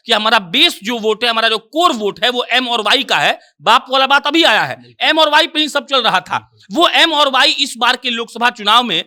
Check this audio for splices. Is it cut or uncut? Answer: uncut